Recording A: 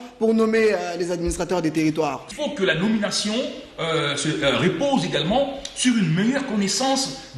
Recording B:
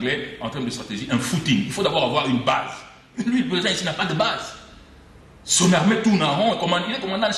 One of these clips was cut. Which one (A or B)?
A